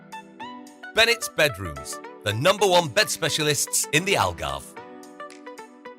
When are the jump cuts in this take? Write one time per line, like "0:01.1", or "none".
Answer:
0:00.9
0:04.6